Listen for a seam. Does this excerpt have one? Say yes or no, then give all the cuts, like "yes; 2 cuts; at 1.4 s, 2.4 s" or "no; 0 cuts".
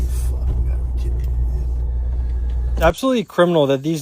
yes; 1 cut; at 2.8 s